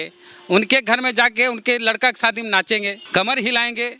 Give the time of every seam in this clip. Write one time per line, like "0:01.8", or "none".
0:03.0